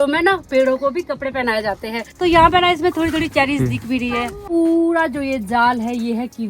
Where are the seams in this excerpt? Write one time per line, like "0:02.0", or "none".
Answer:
0:02.1
0:04.5